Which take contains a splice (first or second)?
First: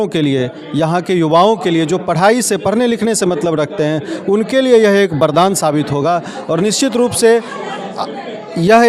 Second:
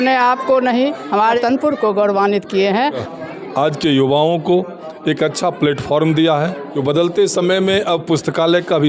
second